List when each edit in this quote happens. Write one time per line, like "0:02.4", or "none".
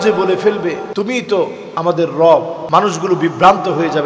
0:00.9
0:01.6
0:02.6